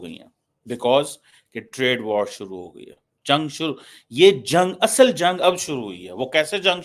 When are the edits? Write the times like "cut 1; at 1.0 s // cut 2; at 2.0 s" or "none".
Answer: none